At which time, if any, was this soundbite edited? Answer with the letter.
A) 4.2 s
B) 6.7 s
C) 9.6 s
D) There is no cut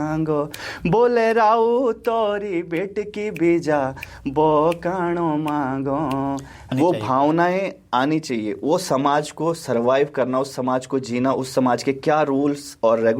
B